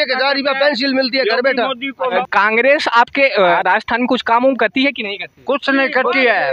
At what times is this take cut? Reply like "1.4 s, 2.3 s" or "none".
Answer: 2.2 s, 3.5 s